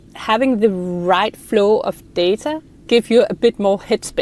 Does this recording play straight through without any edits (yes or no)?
no